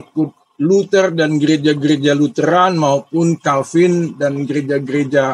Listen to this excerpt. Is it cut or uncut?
uncut